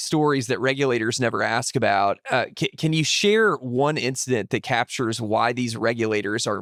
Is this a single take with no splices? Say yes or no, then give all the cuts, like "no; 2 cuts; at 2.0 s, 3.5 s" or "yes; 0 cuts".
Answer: yes; 0 cuts